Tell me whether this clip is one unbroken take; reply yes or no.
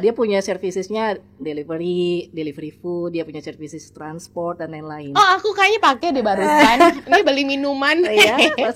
yes